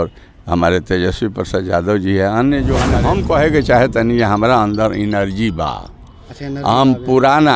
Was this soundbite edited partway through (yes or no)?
yes